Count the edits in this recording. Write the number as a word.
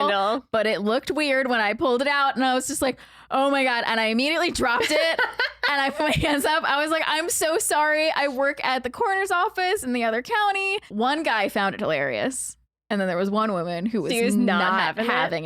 one